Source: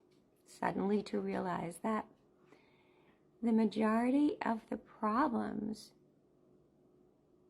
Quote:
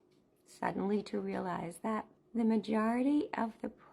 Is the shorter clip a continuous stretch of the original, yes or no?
no